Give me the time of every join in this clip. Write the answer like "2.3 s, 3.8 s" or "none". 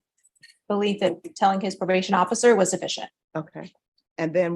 2.8 s